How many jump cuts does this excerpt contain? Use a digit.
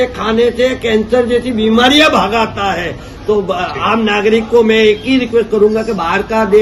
0